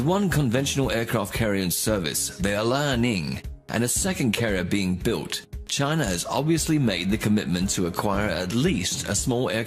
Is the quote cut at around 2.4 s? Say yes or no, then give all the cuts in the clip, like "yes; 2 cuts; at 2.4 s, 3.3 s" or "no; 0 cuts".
no; 1 cut; at 8.0 s